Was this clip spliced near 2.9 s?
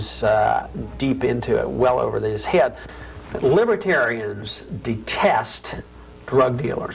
yes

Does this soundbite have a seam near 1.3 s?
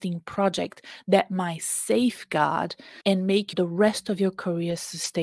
no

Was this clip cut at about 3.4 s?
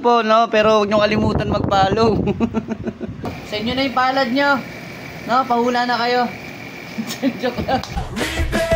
yes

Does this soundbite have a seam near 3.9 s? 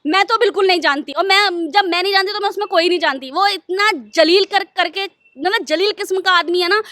no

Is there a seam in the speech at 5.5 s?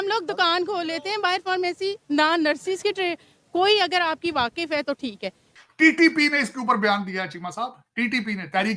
yes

